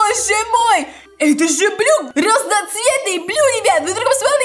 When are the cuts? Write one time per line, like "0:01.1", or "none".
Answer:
0:01.0
0:02.1